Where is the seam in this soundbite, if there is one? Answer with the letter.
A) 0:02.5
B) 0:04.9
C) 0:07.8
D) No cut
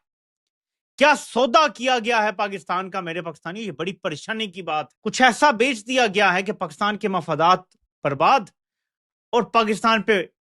B